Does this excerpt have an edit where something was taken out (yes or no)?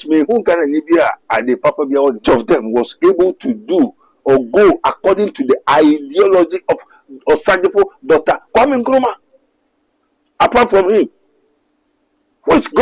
yes